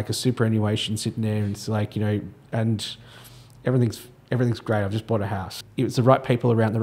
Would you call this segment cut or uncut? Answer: cut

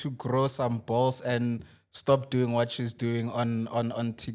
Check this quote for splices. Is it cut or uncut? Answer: uncut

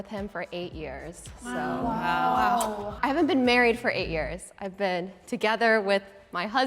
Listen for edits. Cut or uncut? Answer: uncut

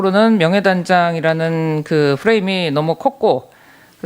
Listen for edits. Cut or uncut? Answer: cut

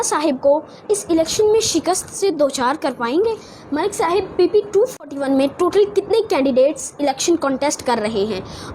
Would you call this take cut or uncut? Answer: cut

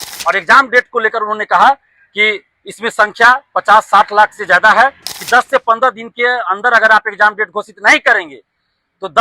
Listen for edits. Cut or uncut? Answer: cut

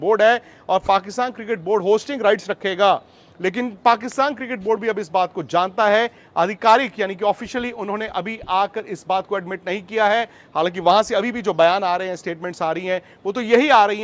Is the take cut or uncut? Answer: uncut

